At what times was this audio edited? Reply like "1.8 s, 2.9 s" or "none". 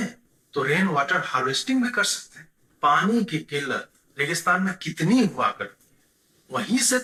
none

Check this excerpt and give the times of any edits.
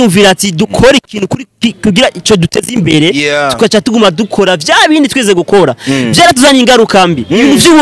none

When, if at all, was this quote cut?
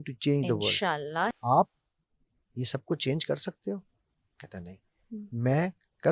1.4 s

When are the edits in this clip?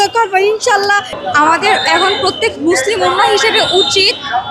1.2 s

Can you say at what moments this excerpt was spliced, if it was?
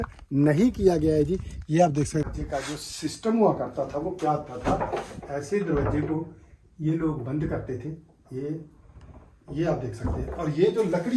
2.2 s

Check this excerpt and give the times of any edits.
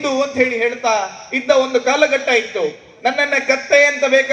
none

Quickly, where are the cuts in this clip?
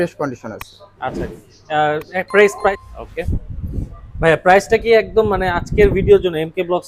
2.8 s

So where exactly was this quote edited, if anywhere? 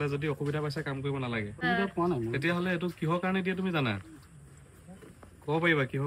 1.5 s

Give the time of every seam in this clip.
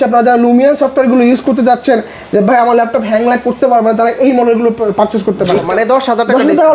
5.7 s

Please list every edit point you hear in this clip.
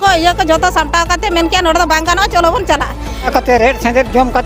3.3 s

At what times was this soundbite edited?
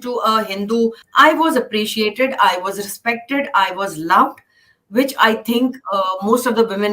1.0 s

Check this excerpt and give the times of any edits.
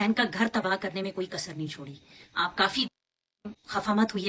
2.9 s

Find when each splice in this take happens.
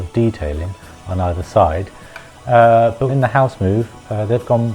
3.0 s

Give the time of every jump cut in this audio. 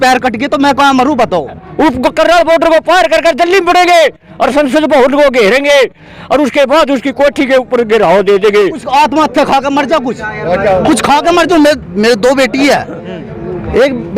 1.6 s, 8.8 s

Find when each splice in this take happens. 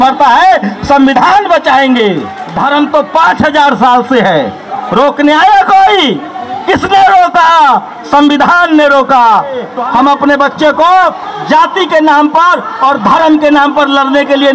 2.4 s, 9.7 s

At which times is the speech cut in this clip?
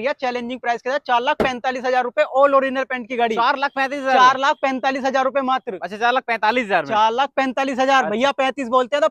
none

